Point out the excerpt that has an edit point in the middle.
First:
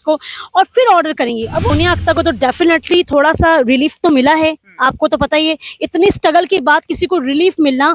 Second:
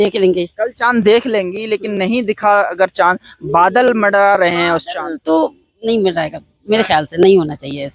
first; 1 cut; at 1.7 s

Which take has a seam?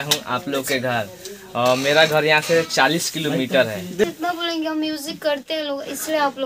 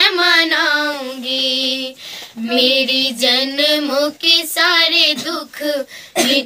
first; 1 cut; at 4.0 s

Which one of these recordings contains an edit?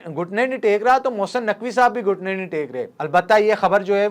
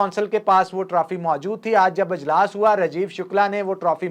first; 1 cut; at 2.9 s

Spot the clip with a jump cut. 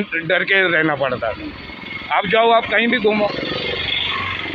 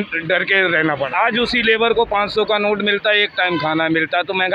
second; 1 cut; at 1.1 s

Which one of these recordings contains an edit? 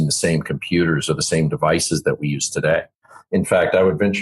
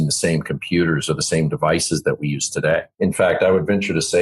second; 1 cut; at 2.9 s

